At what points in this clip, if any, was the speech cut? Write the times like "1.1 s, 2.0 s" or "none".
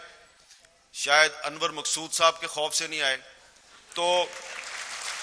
none